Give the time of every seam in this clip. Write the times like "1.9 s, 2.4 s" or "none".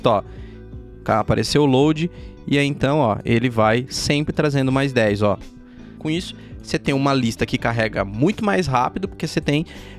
6.0 s